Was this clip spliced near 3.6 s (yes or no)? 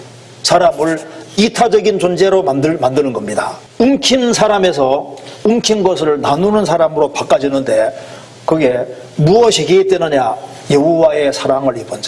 yes